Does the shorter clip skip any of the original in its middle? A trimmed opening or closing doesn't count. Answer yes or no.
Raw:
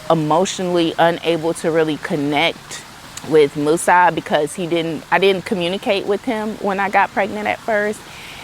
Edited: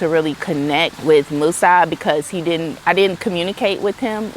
yes